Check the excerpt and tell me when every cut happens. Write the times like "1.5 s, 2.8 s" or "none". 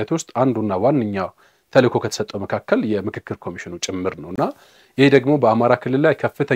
none